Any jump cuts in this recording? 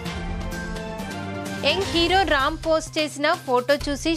no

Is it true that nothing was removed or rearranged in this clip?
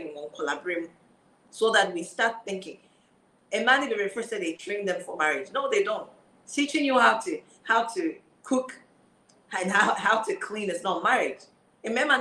yes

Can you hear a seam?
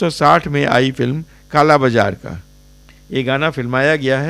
yes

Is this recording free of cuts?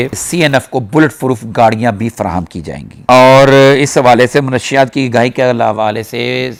yes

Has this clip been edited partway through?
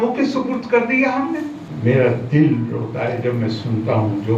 yes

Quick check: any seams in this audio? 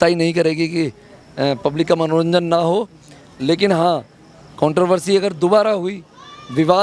no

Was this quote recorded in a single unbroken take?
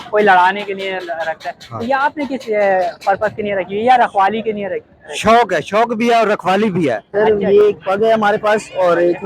no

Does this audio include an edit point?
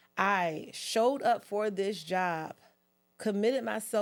no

